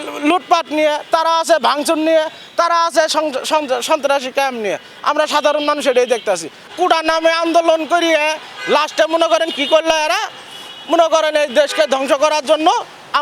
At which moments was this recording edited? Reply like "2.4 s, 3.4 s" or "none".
6.7 s